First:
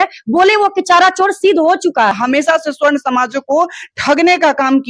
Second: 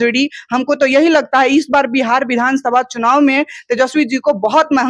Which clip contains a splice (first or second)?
first